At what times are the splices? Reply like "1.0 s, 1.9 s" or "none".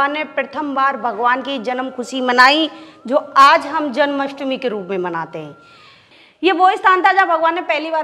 6.0 s